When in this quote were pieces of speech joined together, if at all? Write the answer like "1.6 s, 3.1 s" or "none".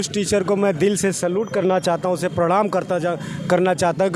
none